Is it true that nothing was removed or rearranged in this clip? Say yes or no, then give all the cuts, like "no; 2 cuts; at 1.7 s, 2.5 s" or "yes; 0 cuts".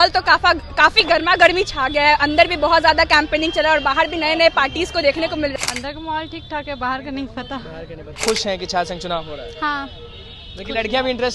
no; 2 cuts; at 5.5 s, 8.1 s